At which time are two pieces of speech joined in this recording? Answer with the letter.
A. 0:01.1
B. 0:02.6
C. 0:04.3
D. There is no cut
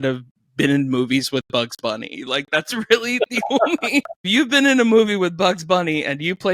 C